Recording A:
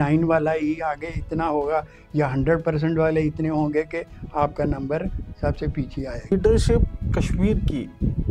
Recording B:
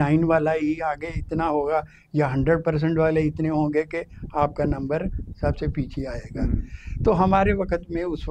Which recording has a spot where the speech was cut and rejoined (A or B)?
A